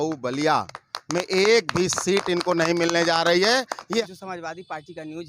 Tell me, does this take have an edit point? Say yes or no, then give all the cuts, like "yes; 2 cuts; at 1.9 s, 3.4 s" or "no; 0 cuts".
yes; 1 cut; at 4.0 s